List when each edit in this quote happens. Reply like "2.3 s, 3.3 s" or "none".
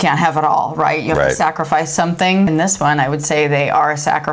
2.5 s